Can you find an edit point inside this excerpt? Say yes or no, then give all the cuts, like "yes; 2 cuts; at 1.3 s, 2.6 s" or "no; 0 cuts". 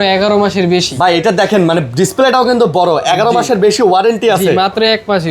no; 0 cuts